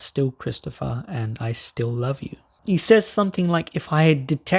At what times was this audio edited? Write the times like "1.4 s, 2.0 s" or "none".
2.5 s